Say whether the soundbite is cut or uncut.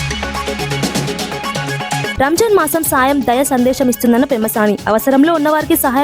cut